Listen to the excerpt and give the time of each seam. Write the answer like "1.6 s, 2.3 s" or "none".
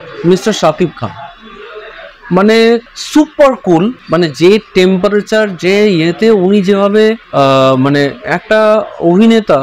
2.9 s, 4.0 s, 7.2 s